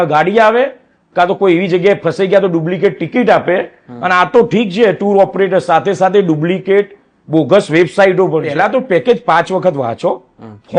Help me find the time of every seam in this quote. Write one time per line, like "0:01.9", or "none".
0:08.5